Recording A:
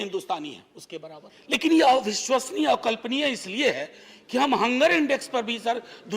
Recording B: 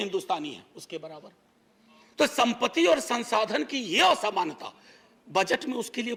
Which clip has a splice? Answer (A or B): A